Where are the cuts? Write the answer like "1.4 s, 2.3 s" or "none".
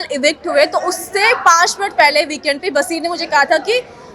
none